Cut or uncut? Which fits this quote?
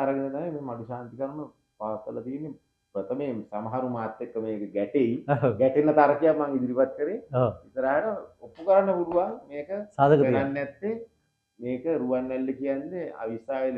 uncut